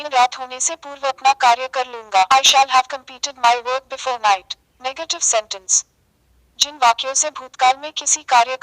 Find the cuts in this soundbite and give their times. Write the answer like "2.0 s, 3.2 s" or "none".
1.4 s